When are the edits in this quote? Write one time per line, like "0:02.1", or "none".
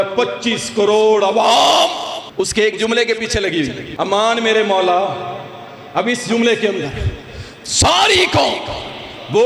0:02.2
0:03.8